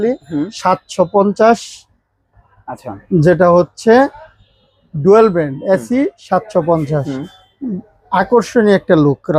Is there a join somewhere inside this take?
no; 0 cuts

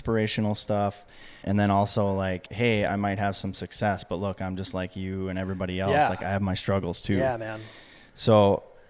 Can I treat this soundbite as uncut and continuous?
no; 2 cuts; at 1.4 s, 2.5 s

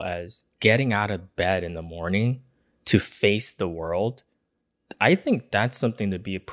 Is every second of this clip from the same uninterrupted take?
yes; 0 cuts

